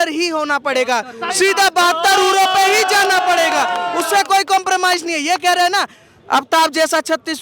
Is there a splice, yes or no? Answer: no